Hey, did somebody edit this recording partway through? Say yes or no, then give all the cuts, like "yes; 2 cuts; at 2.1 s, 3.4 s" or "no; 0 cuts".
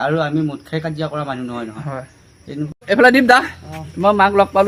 yes; 1 cut; at 2.7 s